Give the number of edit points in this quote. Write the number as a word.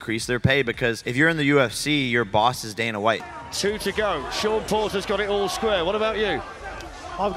one